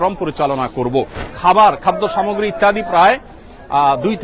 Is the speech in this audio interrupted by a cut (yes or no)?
yes